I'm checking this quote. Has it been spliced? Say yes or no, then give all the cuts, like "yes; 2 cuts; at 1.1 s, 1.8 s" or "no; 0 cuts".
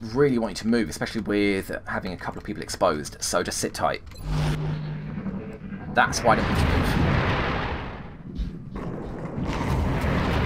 no; 0 cuts